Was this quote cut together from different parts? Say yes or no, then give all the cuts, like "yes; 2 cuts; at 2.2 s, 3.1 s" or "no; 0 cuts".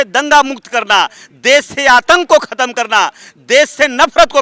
no; 0 cuts